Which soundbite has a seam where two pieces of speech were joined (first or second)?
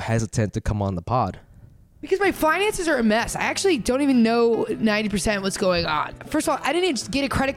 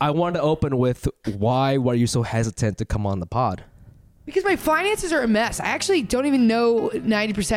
first